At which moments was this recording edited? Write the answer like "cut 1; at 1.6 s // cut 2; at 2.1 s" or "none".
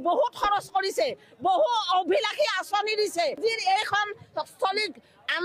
cut 1; at 3.4 s